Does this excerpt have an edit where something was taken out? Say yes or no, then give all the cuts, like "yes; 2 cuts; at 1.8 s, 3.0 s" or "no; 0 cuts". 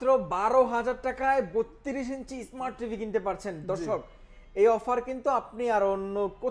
no; 0 cuts